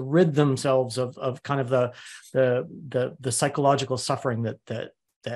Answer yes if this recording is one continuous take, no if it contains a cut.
yes